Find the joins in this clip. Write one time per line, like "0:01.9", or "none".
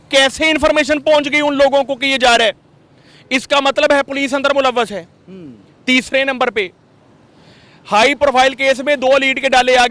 none